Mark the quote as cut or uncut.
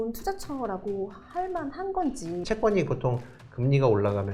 cut